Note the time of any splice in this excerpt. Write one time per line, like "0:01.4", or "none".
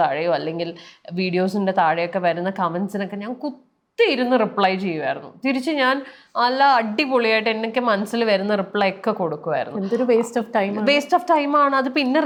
none